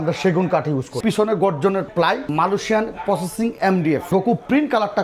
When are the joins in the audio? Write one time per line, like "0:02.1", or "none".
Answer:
0:01.0
0:02.3
0:04.0